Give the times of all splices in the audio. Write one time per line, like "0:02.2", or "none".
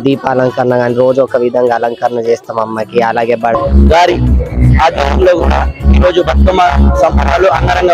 0:03.6